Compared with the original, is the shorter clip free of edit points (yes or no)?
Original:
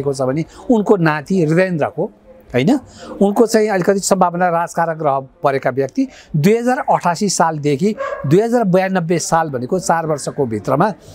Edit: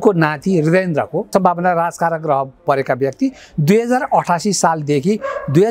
no